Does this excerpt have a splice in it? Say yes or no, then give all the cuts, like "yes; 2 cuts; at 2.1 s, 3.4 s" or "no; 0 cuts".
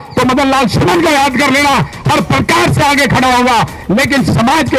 no; 0 cuts